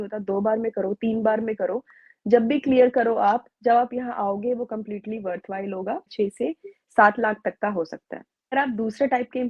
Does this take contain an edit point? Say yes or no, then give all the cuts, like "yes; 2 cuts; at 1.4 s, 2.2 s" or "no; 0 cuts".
yes; 2 cuts; at 6.1 s, 8.5 s